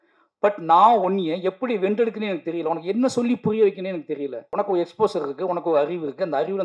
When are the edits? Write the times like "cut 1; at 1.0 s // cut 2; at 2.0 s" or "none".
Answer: cut 1; at 4.5 s